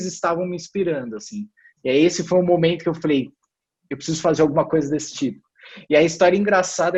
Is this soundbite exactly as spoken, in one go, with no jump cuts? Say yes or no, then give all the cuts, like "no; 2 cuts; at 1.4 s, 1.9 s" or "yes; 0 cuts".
yes; 0 cuts